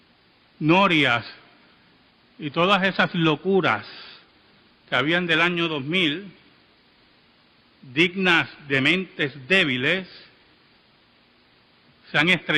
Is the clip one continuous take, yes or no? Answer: yes